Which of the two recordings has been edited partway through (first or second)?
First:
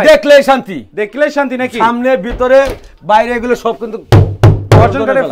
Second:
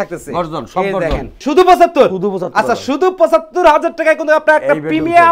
second